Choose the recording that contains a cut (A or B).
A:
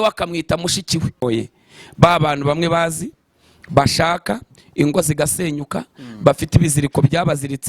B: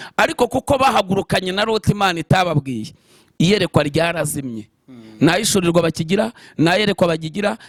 A